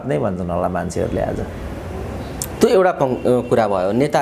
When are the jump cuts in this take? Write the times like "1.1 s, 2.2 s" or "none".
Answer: none